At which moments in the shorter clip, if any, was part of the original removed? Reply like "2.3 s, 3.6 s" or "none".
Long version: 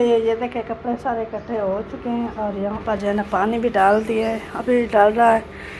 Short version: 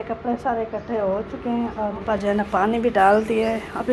2.0 s